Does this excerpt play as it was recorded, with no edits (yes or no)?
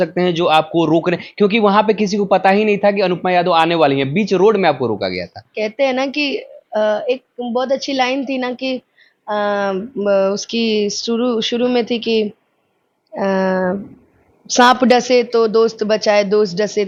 yes